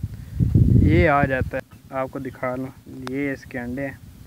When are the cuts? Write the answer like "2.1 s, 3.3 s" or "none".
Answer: 1.7 s